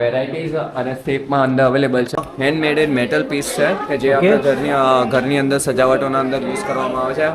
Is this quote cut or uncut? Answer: cut